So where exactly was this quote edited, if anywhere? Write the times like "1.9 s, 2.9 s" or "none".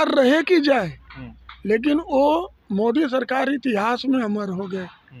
none